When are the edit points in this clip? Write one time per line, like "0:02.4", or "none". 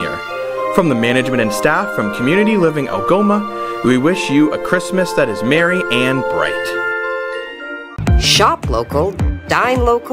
0:07.8

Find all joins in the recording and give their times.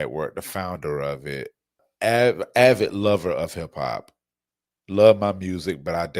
0:01.9

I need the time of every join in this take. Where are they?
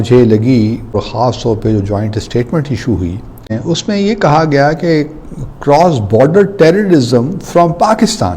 0:00.9
0:03.5

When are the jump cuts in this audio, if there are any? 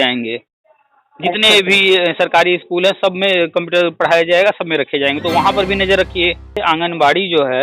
0:06.6

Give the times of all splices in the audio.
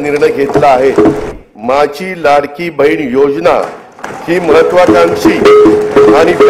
0:01.2

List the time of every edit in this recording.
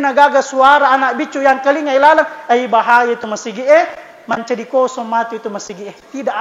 none

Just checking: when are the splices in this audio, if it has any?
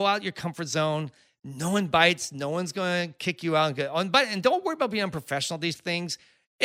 none

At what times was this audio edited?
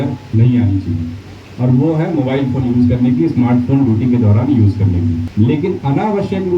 0:05.3

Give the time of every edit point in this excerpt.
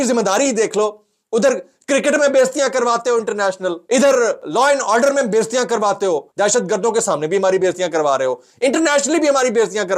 0:03.8
0:04.4

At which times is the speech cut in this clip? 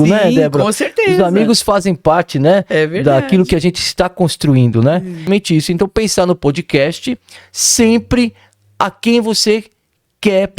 0:05.3

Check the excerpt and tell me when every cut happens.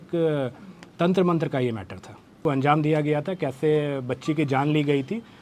0:02.4

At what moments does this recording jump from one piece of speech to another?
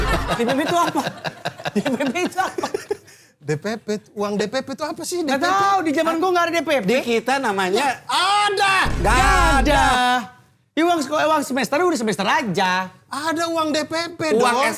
none

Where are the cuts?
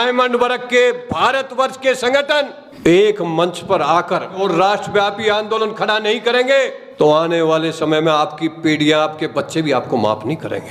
0:04.4

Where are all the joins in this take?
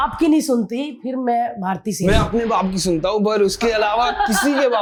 none

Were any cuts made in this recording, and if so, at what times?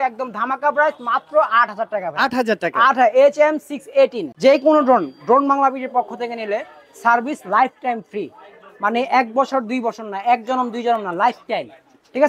0:04.2

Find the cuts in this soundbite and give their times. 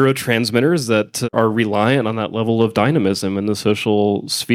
none

